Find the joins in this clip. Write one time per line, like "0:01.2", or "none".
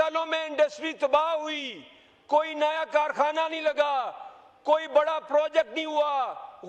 none

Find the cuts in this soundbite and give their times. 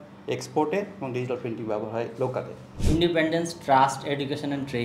0:02.7

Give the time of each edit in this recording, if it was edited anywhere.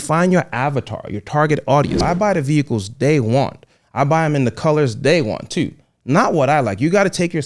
0:02.0

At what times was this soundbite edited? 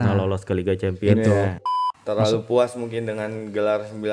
0:01.6

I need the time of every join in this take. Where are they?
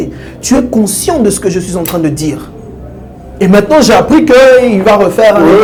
none

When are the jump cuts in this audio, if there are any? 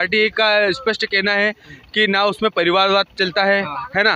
none

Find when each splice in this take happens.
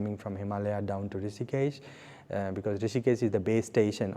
none

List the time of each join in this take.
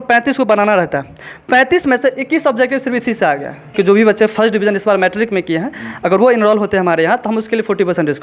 0:03.7

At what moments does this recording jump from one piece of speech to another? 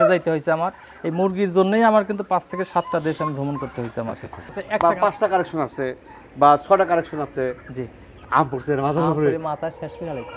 0:04.6

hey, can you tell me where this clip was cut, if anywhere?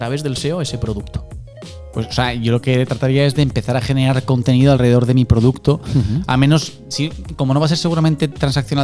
none

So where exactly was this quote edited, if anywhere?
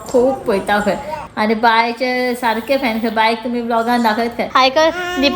0:01.2
0:04.4

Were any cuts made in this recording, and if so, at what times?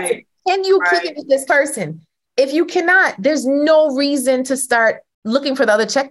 0:05.1

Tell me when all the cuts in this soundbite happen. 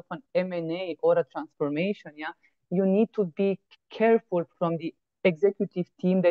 0:04.5

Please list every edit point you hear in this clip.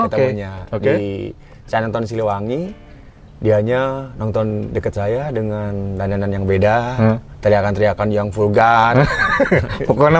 none

